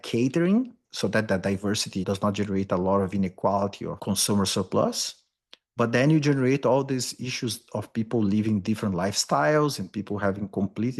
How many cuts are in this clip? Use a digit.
2